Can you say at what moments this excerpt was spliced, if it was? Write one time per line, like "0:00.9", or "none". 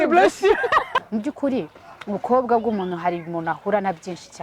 0:01.0